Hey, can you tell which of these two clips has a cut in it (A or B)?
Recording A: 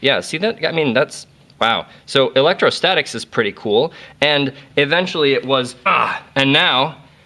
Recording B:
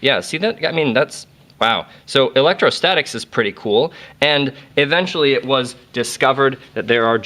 B